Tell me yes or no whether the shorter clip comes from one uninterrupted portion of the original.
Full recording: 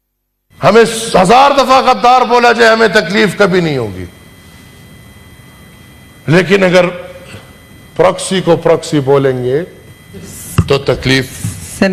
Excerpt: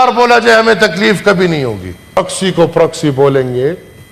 no